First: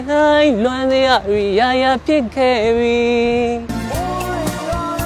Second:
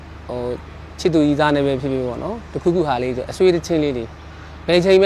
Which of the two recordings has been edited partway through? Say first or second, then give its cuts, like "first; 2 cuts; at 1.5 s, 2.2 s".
first; 1 cut; at 3.7 s